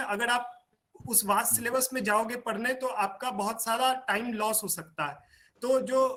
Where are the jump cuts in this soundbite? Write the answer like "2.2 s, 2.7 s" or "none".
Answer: none